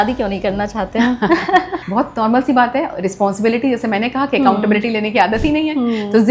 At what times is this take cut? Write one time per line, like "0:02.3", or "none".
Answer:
0:01.8